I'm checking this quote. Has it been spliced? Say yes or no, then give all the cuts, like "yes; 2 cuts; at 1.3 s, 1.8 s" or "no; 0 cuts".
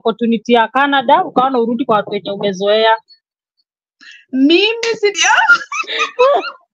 yes; 1 cut; at 5.1 s